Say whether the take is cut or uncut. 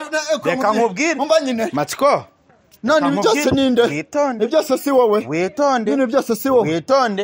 uncut